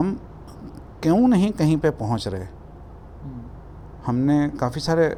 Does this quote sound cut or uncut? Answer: uncut